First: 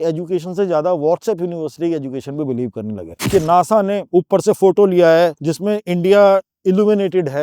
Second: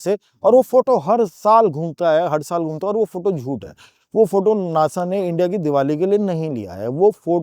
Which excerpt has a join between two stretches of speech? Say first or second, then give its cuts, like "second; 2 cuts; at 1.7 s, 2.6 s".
first; 3 cuts; at 3.1 s, 4.0 s, 5.5 s